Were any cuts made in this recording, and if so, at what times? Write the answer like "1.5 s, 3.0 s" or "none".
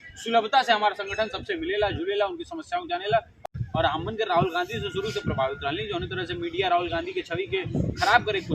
3.4 s